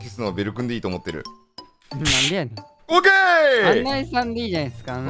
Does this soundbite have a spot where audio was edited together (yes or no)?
no